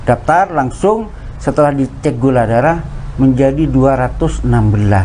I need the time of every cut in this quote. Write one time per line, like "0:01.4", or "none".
none